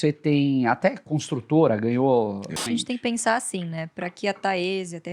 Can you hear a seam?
yes; 1 cut; at 2.6 s

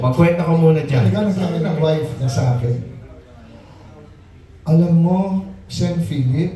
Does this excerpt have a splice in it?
yes; 1 cut; at 1.6 s

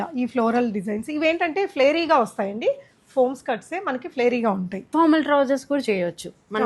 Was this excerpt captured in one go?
no; 1 cut; at 4.7 s

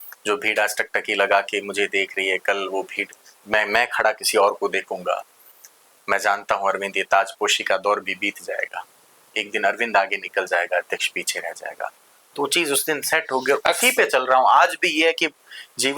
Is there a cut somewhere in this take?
no; 0 cuts

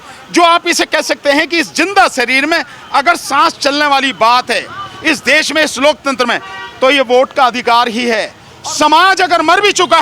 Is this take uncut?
no; 1 cut; at 8.4 s

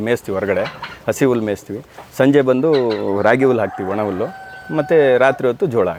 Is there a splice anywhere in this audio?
no; 0 cuts

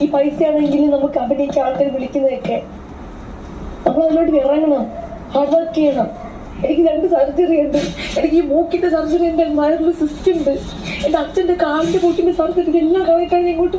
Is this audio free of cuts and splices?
no; 1 cut; at 6.5 s

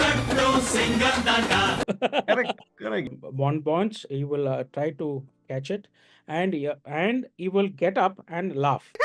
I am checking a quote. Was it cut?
yes; 1 cut; at 3.1 s

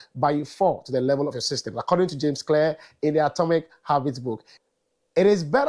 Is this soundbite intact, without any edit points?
no; 1 cut; at 4.5 s

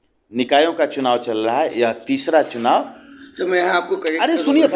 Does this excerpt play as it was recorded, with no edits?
yes; 0 cuts

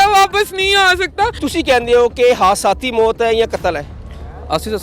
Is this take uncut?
no; 1 cut; at 1.4 s

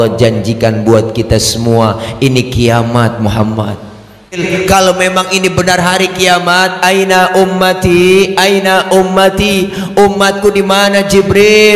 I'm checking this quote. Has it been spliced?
yes; 1 cut; at 4.4 s

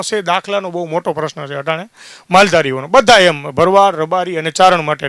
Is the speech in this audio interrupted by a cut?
no; 0 cuts

